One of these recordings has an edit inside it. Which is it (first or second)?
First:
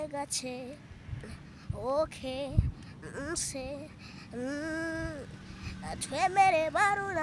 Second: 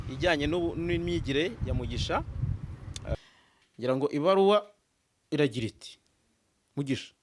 second